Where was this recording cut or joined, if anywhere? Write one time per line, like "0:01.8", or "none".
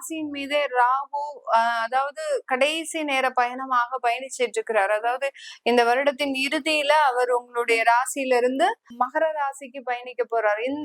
none

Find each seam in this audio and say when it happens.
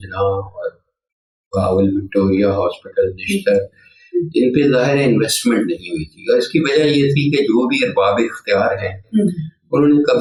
none

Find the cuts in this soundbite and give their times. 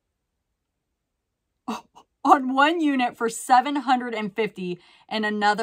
none

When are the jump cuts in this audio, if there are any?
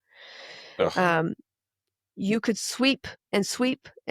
0:03.1

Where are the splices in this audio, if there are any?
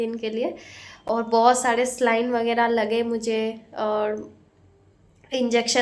none

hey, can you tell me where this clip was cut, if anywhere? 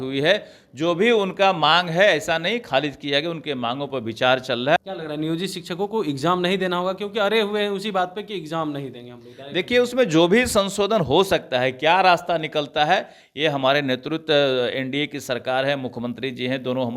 0:04.8

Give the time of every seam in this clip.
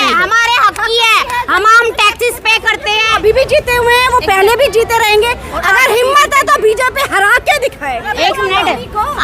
0:03.1
0:08.1

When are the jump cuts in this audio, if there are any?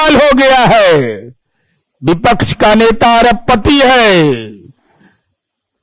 none

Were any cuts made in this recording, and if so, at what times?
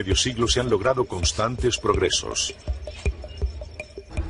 0:03.0

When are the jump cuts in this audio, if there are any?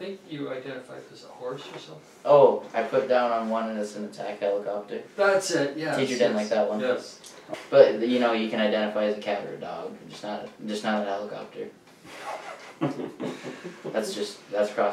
none

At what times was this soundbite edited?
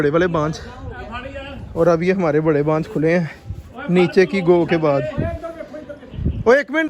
none

